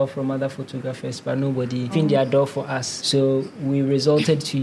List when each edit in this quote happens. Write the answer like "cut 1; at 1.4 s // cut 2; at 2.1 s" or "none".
none